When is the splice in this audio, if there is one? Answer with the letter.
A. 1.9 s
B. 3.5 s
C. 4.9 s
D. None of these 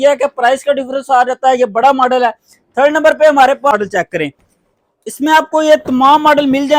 D